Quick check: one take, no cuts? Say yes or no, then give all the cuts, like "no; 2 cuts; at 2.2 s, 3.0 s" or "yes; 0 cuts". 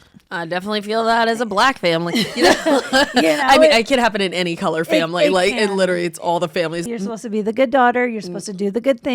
no; 1 cut; at 6.8 s